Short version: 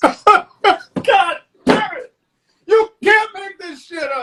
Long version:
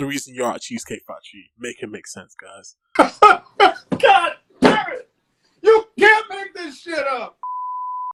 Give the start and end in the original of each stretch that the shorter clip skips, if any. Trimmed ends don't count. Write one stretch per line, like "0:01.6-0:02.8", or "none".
none